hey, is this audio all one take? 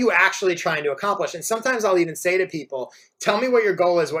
yes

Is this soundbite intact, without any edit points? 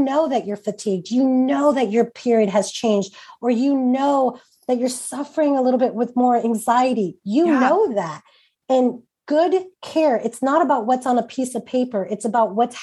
yes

